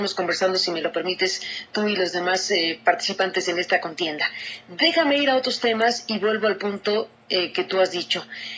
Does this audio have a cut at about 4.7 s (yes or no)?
no